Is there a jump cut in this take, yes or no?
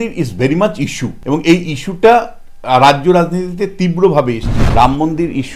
yes